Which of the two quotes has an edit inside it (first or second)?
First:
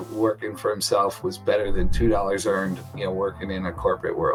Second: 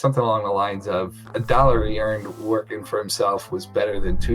second